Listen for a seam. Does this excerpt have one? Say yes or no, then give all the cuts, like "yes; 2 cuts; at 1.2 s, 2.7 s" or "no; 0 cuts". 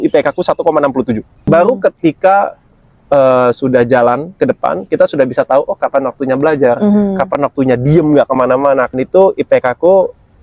yes; 2 cuts; at 1.3 s, 9.0 s